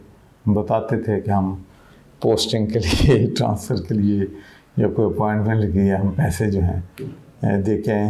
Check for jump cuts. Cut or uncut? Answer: uncut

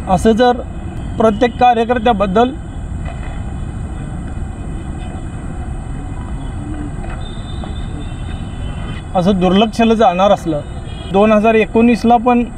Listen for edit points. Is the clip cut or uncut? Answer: cut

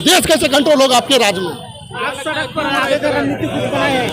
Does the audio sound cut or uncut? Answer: uncut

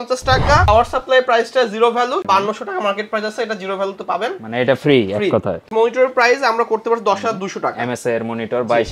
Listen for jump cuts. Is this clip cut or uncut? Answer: cut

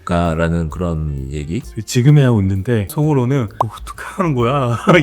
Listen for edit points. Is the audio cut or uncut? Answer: cut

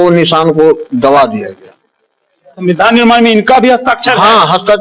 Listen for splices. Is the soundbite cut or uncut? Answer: uncut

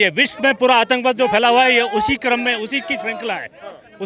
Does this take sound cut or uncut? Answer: uncut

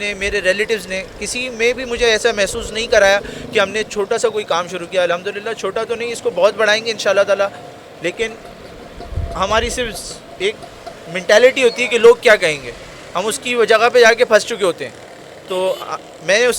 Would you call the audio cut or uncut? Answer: uncut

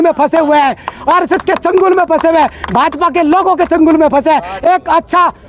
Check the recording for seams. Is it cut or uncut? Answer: uncut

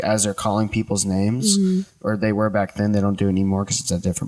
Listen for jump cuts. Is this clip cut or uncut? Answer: uncut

